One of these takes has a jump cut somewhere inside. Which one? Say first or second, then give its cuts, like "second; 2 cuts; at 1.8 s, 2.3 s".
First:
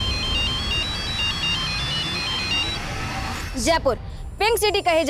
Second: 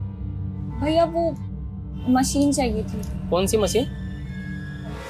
first; 1 cut; at 3.4 s